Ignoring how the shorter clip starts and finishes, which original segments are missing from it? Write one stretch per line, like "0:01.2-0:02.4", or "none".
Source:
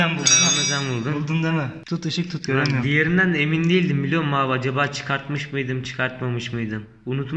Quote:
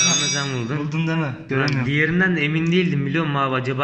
0:01.8-0:02.4